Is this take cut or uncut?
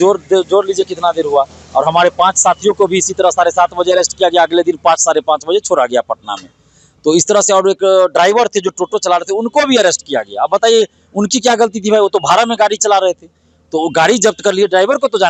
uncut